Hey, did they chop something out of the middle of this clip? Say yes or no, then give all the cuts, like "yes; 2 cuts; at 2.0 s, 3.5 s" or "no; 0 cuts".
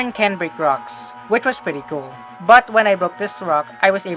yes; 1 cut; at 2.2 s